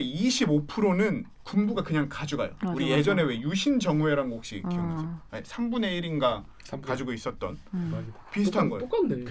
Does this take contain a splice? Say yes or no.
no